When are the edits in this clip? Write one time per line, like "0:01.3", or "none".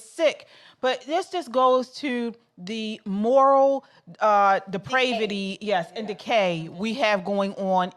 none